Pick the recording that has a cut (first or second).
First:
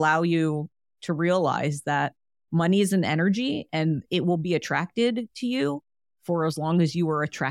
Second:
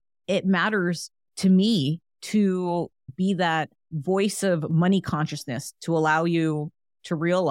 second